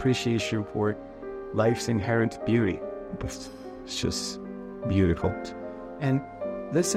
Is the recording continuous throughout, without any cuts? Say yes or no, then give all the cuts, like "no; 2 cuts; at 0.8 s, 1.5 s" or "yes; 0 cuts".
yes; 0 cuts